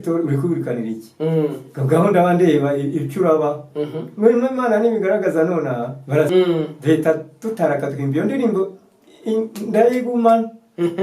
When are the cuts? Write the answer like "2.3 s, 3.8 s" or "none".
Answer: 6.3 s